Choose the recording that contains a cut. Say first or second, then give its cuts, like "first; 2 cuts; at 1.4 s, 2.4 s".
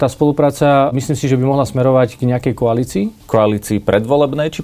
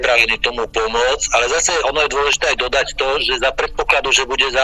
first; 2 cuts; at 0.9 s, 3.2 s